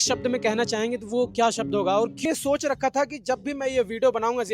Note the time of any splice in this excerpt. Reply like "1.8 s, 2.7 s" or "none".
2.2 s